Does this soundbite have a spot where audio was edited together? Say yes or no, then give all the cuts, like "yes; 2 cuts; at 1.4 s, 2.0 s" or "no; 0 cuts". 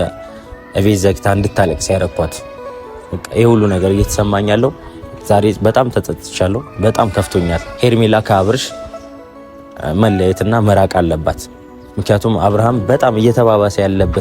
yes; 1 cut; at 7.7 s